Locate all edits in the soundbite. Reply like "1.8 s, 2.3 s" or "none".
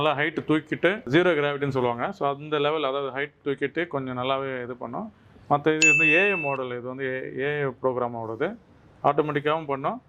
none